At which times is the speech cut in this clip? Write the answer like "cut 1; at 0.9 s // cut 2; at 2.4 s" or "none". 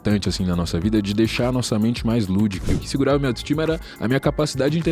cut 1; at 2.8 s